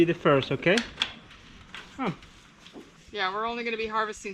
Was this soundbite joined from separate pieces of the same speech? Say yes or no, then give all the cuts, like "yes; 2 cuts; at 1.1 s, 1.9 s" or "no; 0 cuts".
yes; 1 cut; at 2.9 s